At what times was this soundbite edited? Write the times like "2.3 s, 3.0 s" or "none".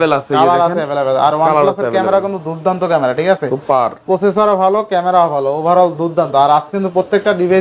none

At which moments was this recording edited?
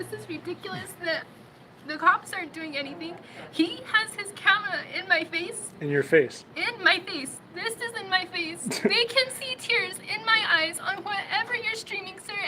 5.6 s, 7.4 s, 10.7 s

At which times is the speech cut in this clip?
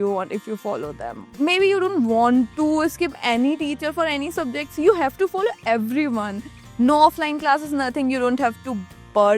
1.3 s, 6.6 s

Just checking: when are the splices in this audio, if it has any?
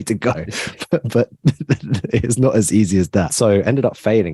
3.3 s

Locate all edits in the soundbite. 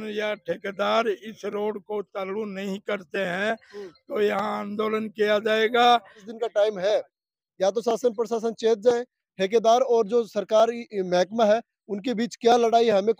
6.3 s

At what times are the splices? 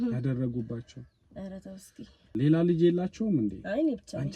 2.3 s

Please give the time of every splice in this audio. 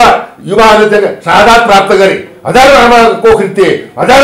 none

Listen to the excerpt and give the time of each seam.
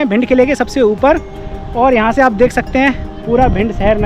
none

